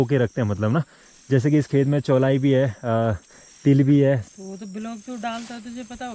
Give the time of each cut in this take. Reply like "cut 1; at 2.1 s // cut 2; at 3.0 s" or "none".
cut 1; at 4.3 s